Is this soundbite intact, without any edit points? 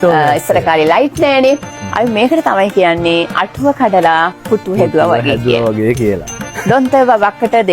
no; 2 cuts; at 1.8 s, 6.6 s

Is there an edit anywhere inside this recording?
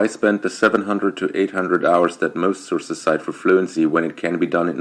no; 0 cuts

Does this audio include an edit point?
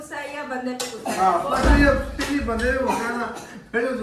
no; 0 cuts

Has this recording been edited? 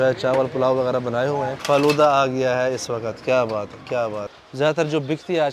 yes; 2 cuts; at 1.6 s, 4.4 s

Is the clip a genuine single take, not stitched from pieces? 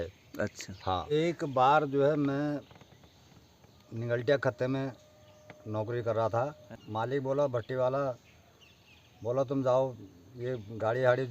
no; 2 cuts; at 1.1 s, 6.6 s

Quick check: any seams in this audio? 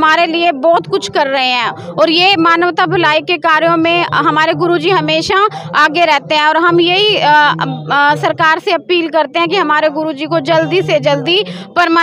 no; 0 cuts

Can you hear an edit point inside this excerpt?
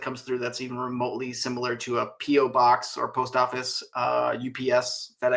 no; 0 cuts

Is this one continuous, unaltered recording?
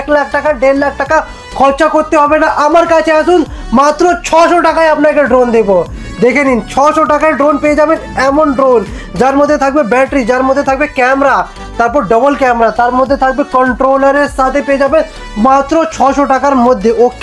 yes; 0 cuts

